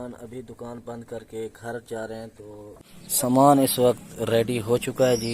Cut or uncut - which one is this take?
cut